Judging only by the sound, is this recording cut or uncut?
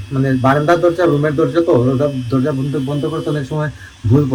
uncut